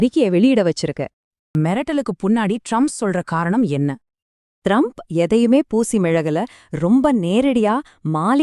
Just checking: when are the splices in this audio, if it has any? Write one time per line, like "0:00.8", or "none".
0:01.5